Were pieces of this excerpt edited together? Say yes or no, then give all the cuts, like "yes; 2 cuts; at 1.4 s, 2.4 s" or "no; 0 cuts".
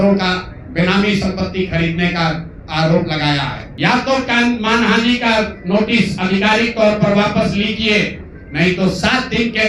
yes; 1 cut; at 3.6 s